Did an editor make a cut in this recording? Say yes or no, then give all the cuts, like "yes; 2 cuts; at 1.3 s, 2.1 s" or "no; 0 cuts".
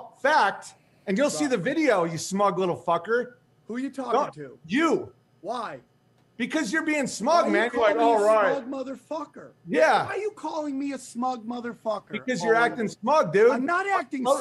yes; 1 cut; at 4.2 s